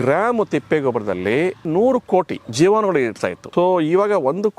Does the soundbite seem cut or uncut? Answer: cut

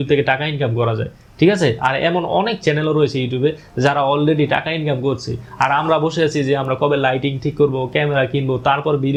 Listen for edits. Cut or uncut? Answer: uncut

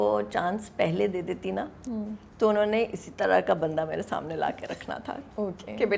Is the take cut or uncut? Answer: uncut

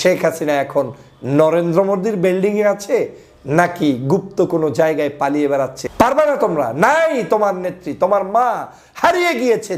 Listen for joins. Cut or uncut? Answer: cut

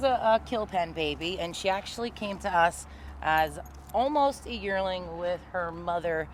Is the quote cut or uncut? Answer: uncut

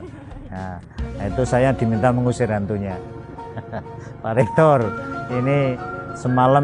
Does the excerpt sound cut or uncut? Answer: uncut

